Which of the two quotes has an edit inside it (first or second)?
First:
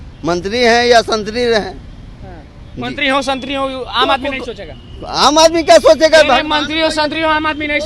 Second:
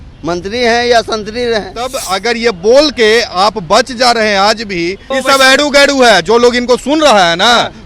second